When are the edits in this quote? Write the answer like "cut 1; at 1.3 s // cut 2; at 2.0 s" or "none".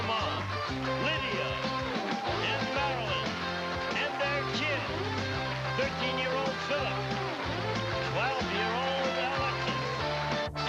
none